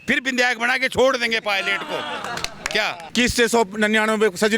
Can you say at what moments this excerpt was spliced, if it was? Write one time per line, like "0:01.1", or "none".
0:03.1